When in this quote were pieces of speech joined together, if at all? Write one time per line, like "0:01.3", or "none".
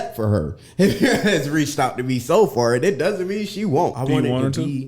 0:04.0